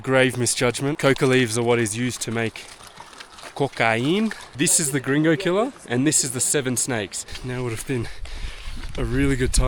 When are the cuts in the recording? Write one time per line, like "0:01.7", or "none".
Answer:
0:01.0
0:04.4
0:07.4